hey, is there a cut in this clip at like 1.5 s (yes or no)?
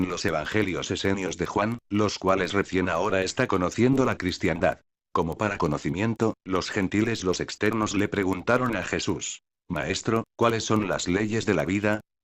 yes